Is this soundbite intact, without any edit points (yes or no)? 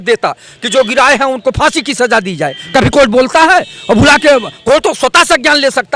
yes